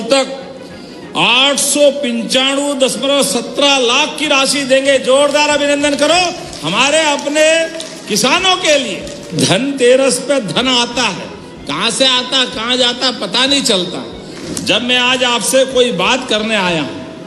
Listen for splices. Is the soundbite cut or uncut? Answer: cut